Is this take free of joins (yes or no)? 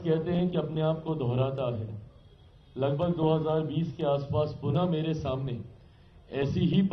yes